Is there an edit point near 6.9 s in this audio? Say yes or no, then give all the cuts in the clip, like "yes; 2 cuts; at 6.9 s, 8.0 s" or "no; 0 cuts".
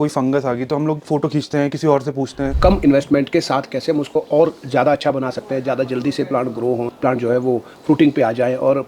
yes; 2 cuts; at 2.5 s, 6.9 s